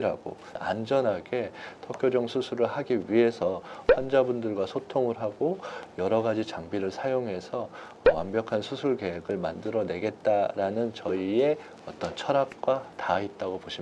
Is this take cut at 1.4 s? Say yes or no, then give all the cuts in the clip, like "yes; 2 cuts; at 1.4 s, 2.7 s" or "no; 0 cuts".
no; 0 cuts